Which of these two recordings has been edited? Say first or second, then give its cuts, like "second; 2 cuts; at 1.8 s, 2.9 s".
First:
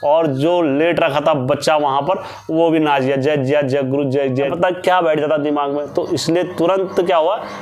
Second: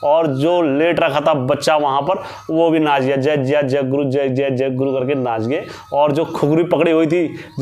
first; 1 cut; at 4.5 s